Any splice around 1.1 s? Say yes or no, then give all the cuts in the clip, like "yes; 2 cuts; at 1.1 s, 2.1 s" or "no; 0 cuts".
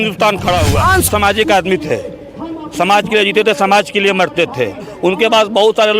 yes; 1 cut; at 1.1 s